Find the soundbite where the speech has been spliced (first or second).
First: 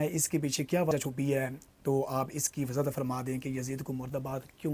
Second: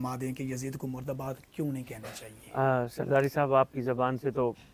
first